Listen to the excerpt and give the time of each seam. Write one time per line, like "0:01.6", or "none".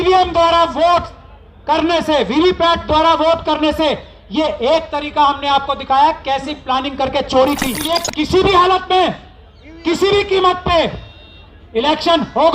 0:08.0